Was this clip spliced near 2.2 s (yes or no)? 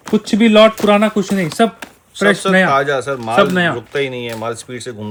no